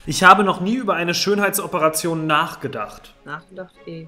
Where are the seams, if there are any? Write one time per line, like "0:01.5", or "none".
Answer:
0:03.1